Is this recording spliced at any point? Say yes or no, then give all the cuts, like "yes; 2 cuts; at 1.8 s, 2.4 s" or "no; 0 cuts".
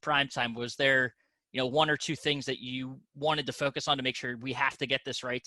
no; 0 cuts